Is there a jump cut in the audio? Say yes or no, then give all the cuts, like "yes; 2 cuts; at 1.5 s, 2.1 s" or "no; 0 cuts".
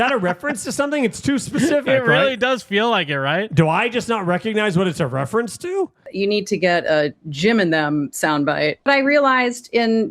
yes; 2 cuts; at 6.0 s, 8.9 s